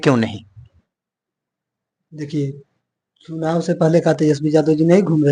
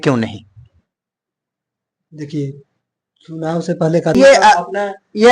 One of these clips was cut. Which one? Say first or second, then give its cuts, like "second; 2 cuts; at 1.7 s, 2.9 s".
second; 1 cut; at 4.1 s